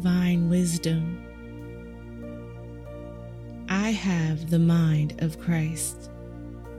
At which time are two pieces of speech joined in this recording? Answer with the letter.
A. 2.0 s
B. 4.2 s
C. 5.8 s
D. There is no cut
C